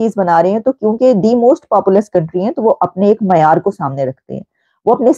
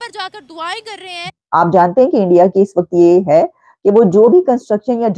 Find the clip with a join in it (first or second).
second